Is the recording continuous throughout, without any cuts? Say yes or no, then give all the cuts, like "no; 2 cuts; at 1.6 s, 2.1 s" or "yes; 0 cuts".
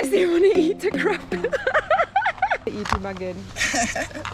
no; 1 cut; at 2.7 s